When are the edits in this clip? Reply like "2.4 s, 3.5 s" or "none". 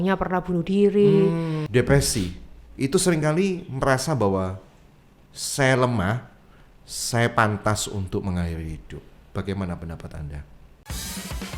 1.6 s, 10.8 s